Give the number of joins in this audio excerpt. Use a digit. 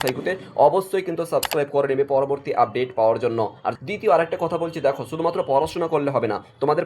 1